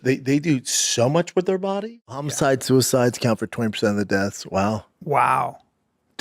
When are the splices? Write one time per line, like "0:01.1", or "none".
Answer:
0:01.9